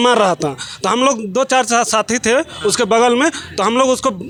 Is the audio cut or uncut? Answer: uncut